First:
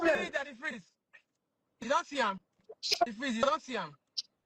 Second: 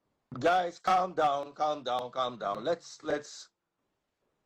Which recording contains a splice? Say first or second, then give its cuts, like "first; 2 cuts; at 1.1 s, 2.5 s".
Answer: first; 1 cut; at 3.1 s